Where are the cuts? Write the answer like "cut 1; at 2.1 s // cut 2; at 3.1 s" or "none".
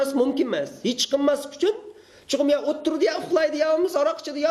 none